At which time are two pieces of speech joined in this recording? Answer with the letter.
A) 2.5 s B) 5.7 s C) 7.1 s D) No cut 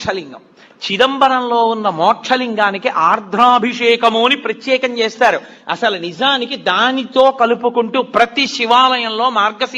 A